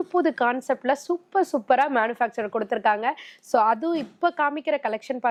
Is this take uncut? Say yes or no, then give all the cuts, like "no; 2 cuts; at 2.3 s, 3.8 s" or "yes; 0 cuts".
yes; 0 cuts